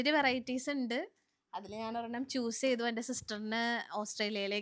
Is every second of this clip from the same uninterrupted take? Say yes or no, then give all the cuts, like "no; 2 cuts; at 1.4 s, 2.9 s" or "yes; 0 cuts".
yes; 0 cuts